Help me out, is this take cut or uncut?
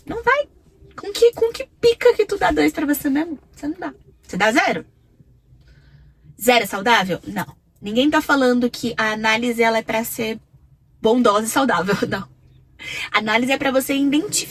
uncut